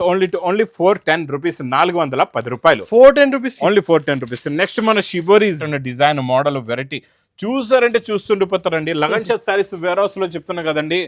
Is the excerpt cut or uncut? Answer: cut